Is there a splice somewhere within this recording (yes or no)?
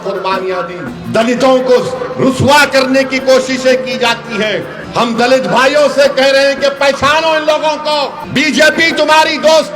yes